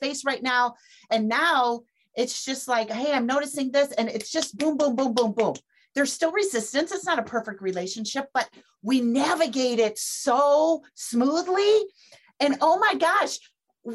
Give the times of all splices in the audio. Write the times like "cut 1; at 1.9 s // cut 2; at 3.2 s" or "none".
cut 1; at 1.1 s // cut 2; at 5.8 s

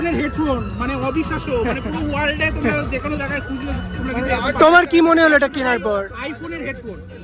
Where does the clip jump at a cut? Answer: none

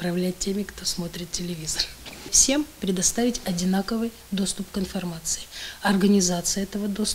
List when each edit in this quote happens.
cut 1; at 2.3 s

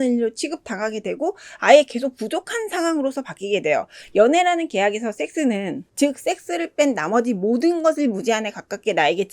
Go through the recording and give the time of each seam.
cut 1; at 5.8 s

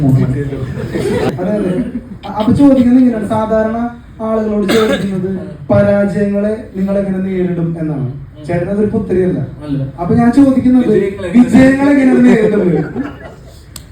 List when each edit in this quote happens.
cut 1; at 1.3 s

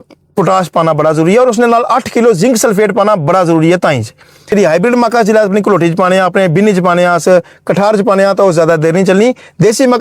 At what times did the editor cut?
cut 1; at 4.5 s

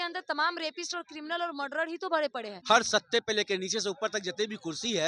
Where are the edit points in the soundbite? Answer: cut 1; at 2.5 s

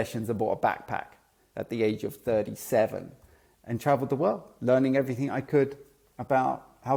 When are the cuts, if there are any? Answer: none

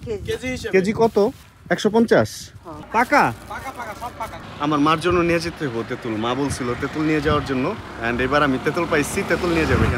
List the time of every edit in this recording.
cut 1; at 2.8 s // cut 2; at 4.4 s

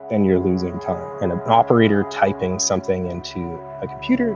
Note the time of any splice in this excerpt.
cut 1; at 1.1 s

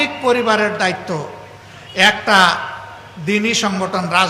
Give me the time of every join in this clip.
none

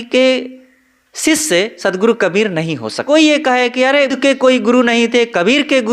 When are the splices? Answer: cut 1; at 2.9 s // cut 2; at 4.1 s

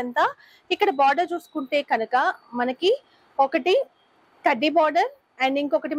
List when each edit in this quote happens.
none

